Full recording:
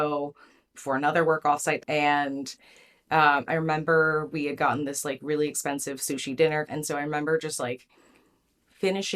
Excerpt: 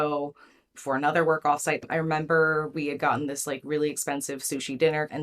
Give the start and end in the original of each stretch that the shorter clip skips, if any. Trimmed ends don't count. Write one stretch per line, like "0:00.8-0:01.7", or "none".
0:01.9-0:03.4